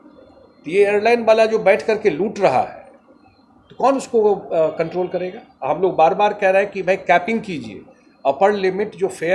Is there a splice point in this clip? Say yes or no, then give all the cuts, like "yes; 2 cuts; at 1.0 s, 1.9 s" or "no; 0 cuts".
yes; 1 cut; at 5.5 s